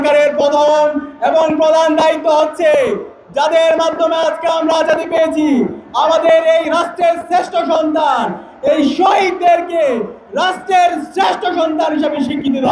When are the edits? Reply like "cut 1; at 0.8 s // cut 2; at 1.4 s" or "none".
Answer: none